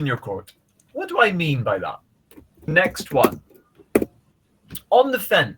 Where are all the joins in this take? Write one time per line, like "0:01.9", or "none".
0:02.7